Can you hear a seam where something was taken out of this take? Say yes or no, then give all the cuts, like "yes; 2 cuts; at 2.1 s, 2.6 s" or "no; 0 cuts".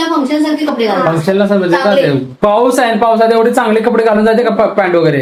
no; 0 cuts